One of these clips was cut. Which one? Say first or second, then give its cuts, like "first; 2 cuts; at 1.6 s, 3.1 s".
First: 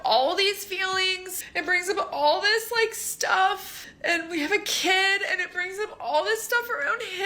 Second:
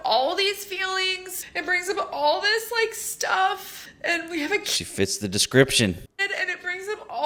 first; 1 cut; at 4.9 s